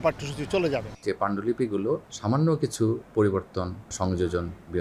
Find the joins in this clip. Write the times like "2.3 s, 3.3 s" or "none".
0.9 s, 2.1 s, 3.9 s

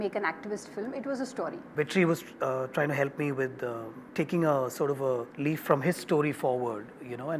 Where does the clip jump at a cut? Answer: 1.7 s, 3.9 s, 5.3 s

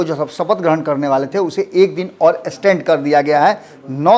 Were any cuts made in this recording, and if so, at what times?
none

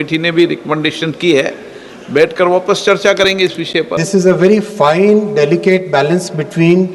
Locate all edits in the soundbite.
4.0 s

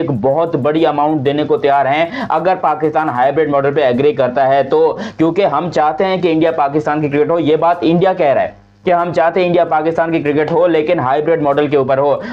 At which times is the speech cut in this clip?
none

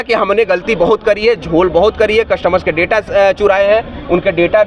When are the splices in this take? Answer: none

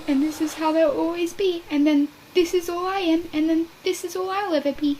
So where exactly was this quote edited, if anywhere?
none

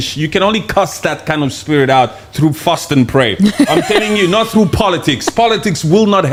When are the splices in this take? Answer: none

